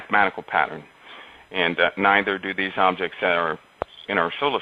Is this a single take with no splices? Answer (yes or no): no